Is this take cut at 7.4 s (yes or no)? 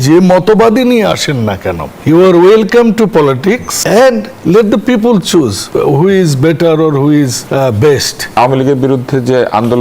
yes